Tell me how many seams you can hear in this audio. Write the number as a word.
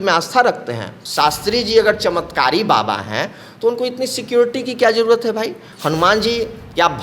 one